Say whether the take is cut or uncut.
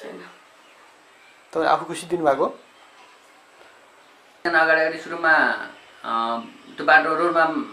cut